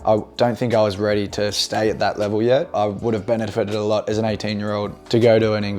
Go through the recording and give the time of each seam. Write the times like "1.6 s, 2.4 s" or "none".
2.7 s, 5.0 s

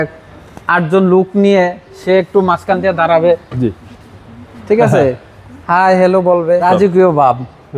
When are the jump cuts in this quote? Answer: 6.6 s

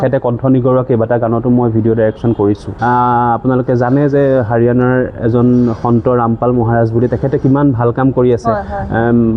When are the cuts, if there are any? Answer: 2.7 s

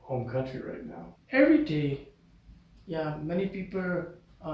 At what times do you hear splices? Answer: 1.1 s

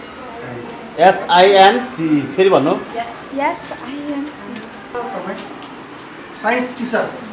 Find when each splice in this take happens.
4.9 s

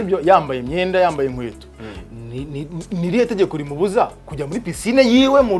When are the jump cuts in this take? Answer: none

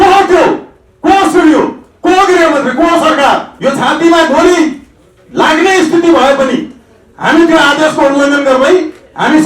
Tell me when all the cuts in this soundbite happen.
3.5 s

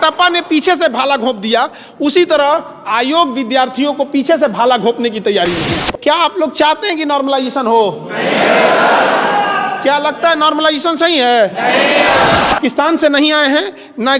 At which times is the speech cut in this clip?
5.9 s, 12.6 s

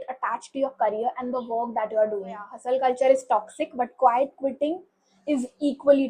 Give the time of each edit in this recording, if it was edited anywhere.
2.5 s

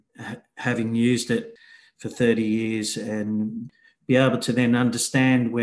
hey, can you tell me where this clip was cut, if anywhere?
1.6 s, 3.6 s

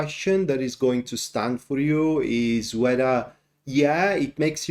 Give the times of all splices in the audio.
none

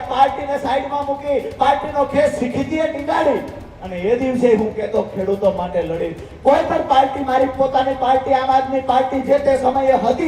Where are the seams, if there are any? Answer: none

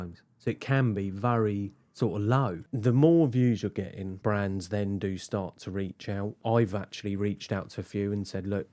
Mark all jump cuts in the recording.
2.6 s, 4.1 s, 6.4 s

